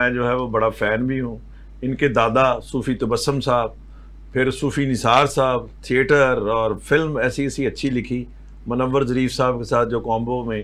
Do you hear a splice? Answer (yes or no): no